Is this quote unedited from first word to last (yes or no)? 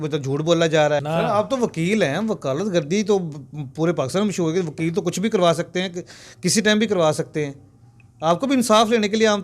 no